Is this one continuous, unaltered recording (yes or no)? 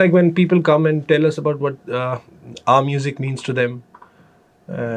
yes